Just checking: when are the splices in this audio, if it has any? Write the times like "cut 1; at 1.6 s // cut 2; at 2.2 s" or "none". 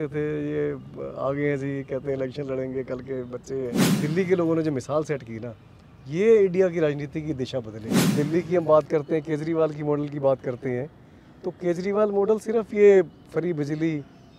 cut 1; at 3.9 s // cut 2; at 8.1 s